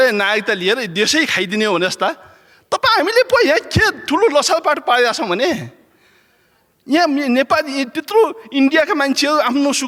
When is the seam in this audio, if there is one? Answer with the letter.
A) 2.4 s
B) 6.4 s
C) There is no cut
C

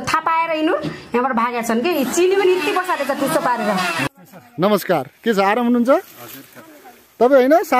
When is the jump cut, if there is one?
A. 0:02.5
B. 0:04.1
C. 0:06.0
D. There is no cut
B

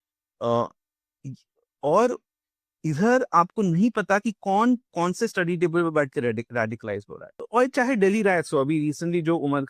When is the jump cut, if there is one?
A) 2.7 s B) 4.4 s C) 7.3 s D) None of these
C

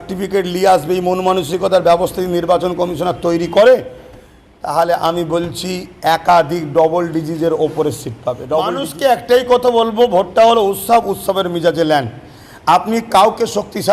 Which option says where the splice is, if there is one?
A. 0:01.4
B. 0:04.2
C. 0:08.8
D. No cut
C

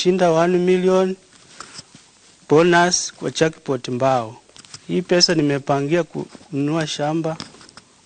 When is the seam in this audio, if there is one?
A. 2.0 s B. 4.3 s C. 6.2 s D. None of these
D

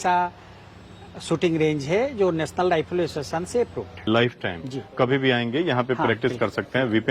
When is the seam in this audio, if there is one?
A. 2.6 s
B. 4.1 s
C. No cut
B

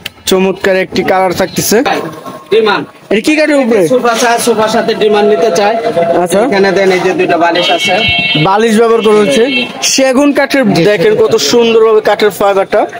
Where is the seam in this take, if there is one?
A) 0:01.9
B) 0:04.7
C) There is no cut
A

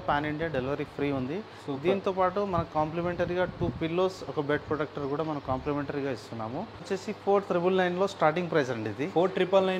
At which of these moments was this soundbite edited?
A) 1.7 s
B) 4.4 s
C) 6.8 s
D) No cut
C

